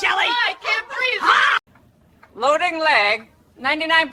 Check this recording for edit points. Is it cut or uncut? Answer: uncut